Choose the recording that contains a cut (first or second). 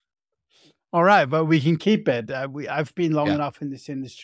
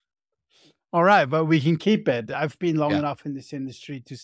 second